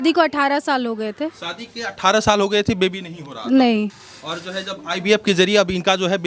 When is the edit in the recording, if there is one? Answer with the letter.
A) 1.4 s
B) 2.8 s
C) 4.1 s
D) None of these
D